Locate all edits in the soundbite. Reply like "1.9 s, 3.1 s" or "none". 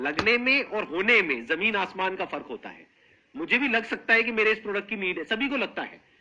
none